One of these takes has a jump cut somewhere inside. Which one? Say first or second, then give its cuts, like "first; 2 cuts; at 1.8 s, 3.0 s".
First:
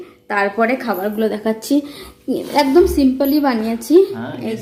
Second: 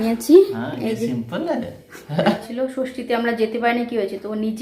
second; 1 cut; at 2.5 s